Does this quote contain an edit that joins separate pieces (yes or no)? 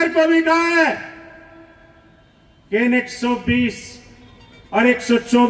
no